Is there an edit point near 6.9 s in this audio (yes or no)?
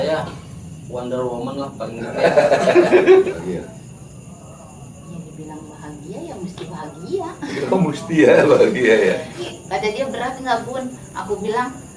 no